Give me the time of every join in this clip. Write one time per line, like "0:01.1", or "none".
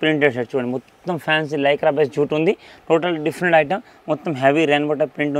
none